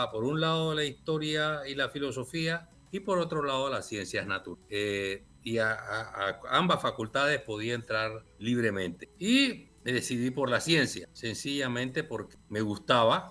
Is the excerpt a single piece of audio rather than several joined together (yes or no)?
no